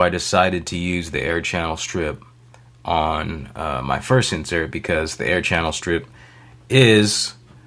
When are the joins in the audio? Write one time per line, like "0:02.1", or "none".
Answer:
none